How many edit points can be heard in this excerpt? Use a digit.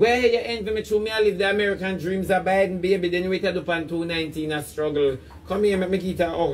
0